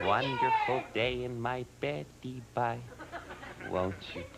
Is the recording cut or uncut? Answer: cut